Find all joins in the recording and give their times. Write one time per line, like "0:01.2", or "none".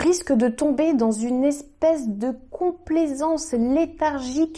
none